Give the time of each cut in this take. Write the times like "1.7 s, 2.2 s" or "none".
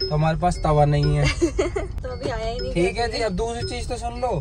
1.7 s